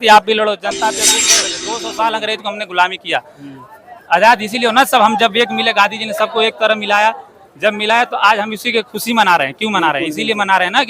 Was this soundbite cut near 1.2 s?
yes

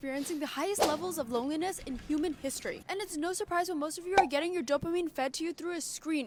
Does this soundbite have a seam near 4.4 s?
no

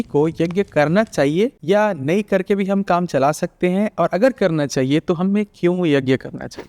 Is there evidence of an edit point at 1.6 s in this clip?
yes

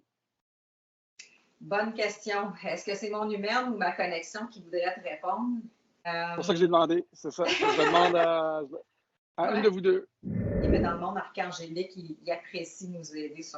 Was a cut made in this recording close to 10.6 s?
yes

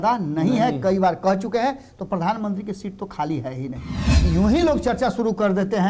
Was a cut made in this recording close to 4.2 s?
yes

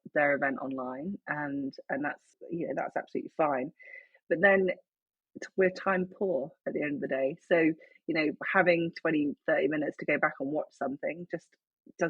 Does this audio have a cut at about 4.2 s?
no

